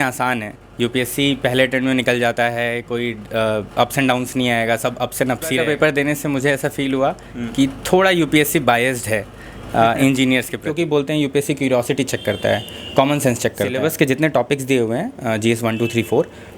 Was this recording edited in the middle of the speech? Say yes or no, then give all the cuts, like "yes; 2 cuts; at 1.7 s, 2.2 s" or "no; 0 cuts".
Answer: yes; 3 cuts; at 5.6 s, 10.7 s, 13.8 s